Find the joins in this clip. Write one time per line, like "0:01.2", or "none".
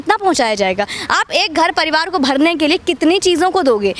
none